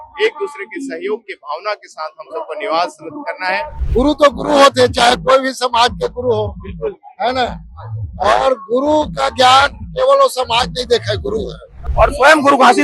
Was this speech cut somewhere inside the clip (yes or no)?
yes